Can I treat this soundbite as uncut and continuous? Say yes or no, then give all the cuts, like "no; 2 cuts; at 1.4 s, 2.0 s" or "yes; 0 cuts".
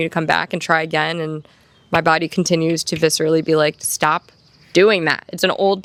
yes; 0 cuts